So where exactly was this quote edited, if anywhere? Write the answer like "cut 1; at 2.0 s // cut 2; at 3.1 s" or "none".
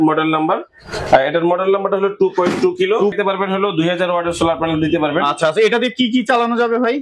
cut 1; at 3.1 s